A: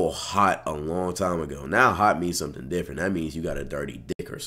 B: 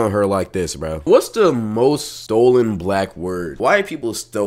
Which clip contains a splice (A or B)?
B